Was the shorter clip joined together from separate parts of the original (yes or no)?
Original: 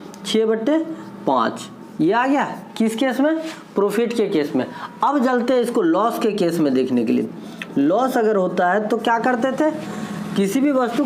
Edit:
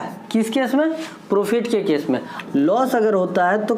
yes